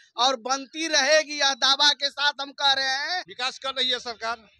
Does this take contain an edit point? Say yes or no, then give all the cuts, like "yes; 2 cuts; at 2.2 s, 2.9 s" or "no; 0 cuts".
yes; 1 cut; at 3.3 s